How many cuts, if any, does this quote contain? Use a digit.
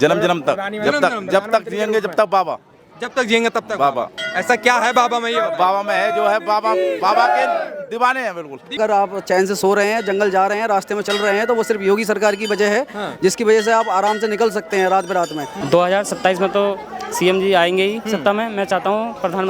2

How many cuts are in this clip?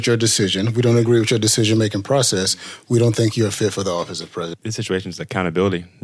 1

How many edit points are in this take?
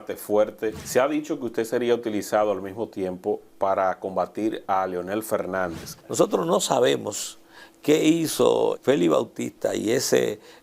3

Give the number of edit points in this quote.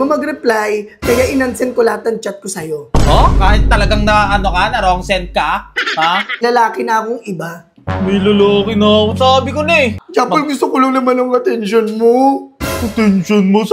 2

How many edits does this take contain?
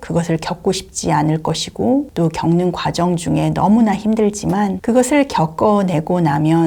2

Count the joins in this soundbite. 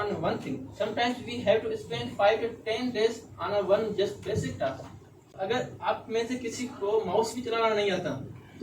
1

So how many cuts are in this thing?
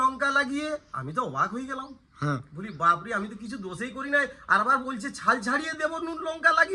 0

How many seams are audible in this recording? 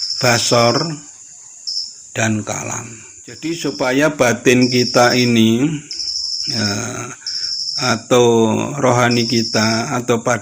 1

